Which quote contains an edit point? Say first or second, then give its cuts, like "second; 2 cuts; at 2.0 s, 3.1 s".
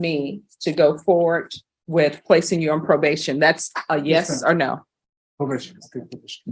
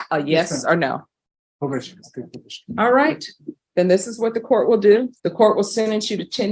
second; 1 cut; at 5.2 s